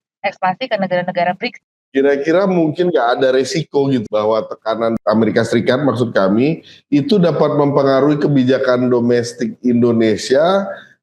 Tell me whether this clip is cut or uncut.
cut